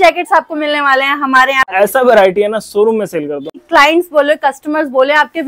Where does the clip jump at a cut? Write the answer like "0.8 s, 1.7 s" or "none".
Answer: 1.7 s, 3.6 s